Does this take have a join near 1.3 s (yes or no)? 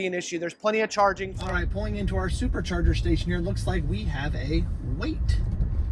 yes